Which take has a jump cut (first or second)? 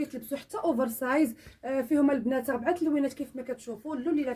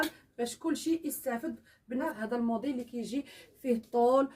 second